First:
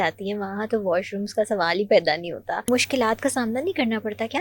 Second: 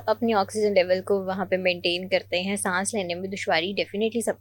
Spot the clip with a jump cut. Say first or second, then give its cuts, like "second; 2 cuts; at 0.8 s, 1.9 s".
first; 1 cut; at 2.7 s